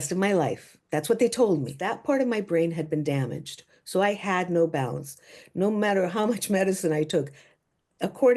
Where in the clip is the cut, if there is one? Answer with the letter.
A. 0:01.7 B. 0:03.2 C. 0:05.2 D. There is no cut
A